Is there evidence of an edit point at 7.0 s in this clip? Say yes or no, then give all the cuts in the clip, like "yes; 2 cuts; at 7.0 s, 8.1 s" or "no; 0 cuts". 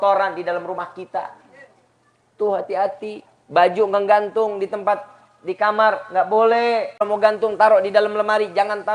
yes; 1 cut; at 7.0 s